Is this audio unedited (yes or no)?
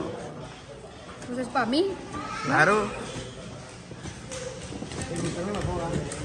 yes